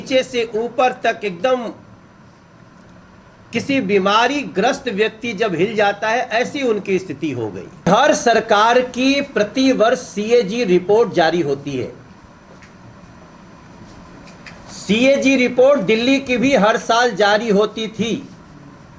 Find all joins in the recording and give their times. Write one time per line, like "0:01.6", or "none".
0:07.9